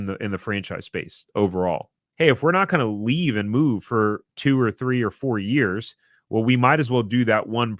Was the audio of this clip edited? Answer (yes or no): yes